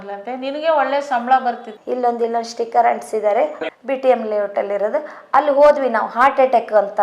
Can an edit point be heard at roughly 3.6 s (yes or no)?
yes